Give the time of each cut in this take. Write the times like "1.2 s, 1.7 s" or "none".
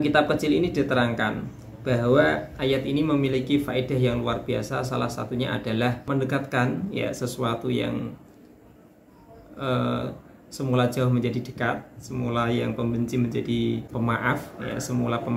6.0 s, 13.9 s

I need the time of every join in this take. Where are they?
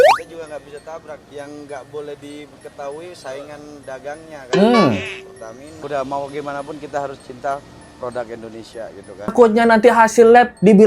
1.2 s, 5.7 s, 9.3 s

